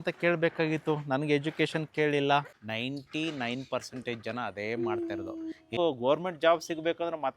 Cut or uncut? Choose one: cut